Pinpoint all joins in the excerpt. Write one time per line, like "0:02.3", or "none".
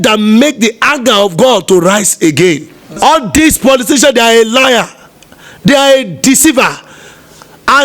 0:02.9